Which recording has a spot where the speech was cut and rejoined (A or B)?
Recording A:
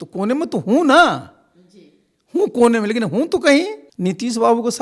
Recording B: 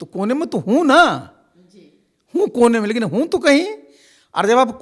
A